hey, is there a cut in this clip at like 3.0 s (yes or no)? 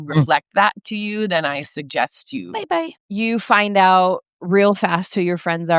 yes